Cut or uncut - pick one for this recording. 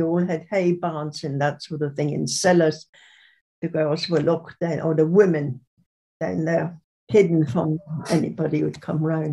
uncut